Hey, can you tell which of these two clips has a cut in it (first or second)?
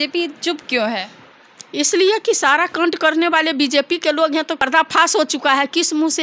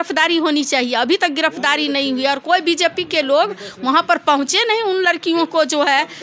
first